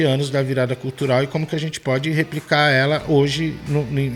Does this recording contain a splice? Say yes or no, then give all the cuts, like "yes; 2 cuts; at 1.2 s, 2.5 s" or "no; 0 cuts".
no; 0 cuts